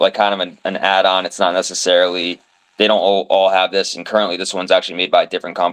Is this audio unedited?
yes; 0 cuts

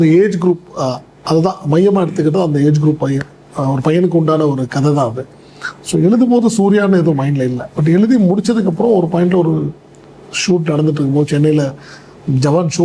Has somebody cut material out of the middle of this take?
no; 0 cuts

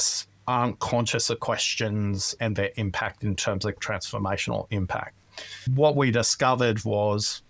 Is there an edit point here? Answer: yes; 3 cuts; at 2.3 s, 3.8 s, 5.7 s

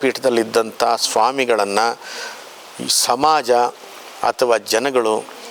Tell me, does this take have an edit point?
no; 0 cuts

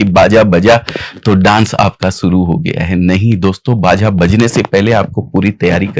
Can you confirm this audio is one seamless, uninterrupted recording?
yes; 0 cuts

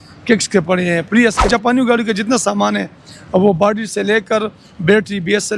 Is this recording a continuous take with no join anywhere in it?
no; 1 cut; at 1.5 s

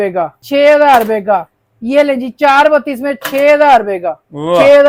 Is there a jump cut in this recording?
no; 0 cuts

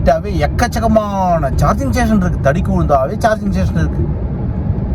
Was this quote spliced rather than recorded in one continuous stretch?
no; 0 cuts

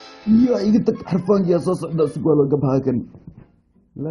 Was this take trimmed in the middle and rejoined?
yes; 1 cut; at 2.1 s

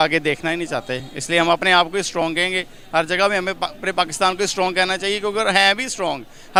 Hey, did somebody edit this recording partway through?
no; 0 cuts

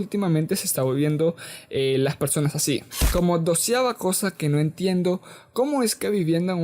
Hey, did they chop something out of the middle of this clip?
yes; 1 cut; at 3.0 s

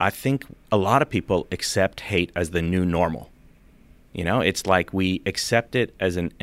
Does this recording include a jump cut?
no; 0 cuts

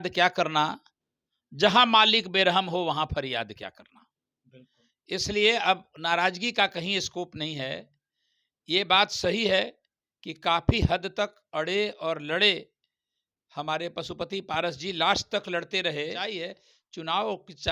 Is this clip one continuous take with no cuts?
no; 1 cut; at 16.3 s

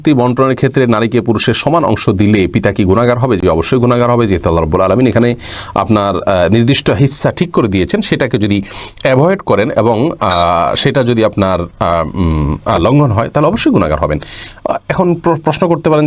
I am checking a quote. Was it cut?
no; 0 cuts

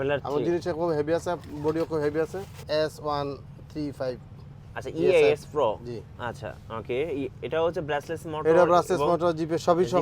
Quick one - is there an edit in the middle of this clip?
yes; 1 cut; at 2.6 s

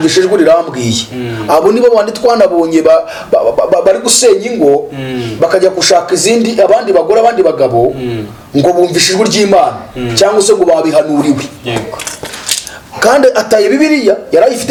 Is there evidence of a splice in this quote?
no; 0 cuts

